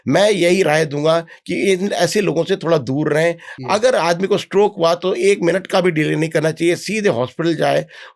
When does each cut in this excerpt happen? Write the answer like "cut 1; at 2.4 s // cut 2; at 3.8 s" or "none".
cut 1; at 3.6 s

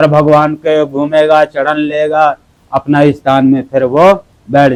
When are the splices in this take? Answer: none

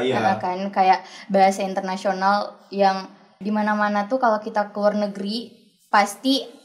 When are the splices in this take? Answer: cut 1; at 3.4 s

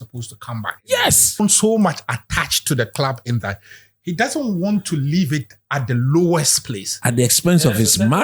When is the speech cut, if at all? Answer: cut 1; at 1.4 s

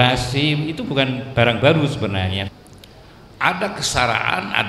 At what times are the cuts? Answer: cut 1; at 2.5 s

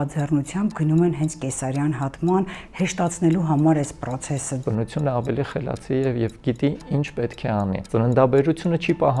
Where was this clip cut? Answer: cut 1; at 4.6 s // cut 2; at 7.8 s

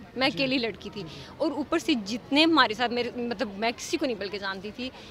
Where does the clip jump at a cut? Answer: none

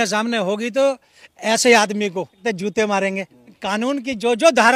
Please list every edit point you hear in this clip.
cut 1; at 2.4 s // cut 2; at 3.6 s

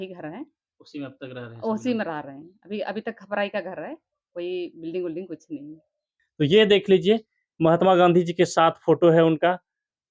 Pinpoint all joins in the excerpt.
cut 1; at 6.2 s

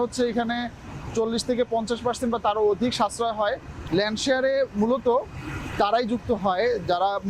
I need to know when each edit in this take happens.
cut 1; at 3.7 s

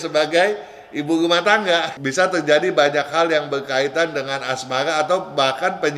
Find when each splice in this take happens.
cut 1; at 2.0 s

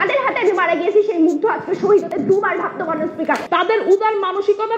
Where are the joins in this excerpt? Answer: cut 1; at 3.4 s

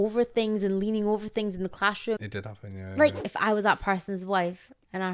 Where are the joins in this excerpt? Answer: cut 1; at 2.2 s // cut 2; at 3.2 s

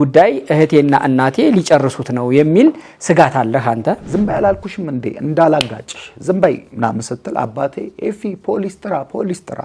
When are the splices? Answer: cut 1; at 4.0 s

